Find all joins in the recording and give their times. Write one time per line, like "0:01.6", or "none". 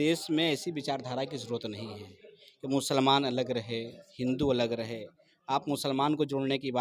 none